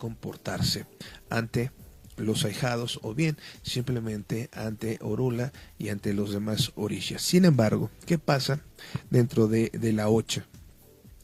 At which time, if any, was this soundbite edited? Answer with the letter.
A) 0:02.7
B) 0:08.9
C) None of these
A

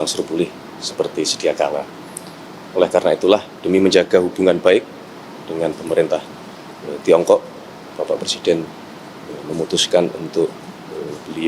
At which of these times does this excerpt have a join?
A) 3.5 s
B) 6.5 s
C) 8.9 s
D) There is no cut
A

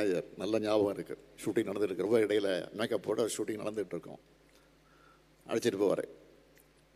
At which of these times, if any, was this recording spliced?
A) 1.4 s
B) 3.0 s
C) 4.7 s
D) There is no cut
A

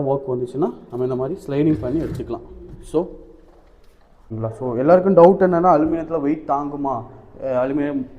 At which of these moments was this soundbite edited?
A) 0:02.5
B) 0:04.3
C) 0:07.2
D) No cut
B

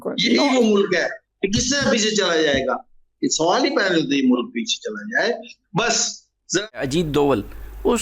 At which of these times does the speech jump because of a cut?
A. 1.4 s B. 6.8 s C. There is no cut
B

